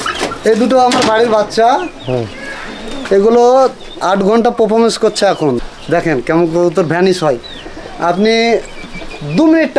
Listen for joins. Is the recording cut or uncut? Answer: cut